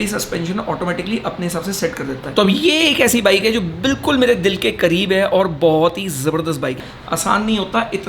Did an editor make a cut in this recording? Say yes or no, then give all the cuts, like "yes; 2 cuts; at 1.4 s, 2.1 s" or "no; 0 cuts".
yes; 2 cuts; at 2.2 s, 6.8 s